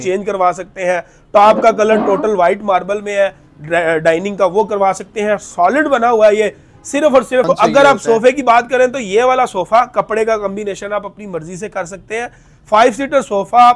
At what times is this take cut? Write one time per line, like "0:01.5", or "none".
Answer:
0:07.5